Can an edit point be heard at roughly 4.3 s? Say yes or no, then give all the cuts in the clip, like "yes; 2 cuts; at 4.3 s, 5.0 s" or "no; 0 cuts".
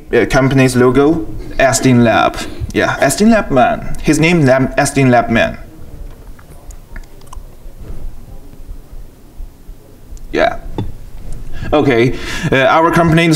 yes; 1 cut; at 4.3 s